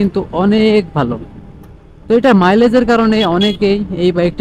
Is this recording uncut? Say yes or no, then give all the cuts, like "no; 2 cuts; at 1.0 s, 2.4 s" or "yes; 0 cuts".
yes; 0 cuts